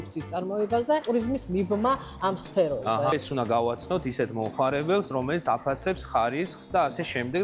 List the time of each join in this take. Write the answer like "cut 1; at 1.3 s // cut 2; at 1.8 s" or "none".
cut 1; at 1.0 s // cut 2; at 3.1 s // cut 3; at 5.1 s